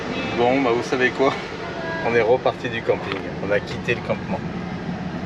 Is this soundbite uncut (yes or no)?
yes